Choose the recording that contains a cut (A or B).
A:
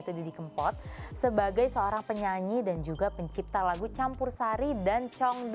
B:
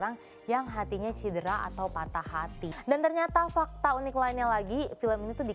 B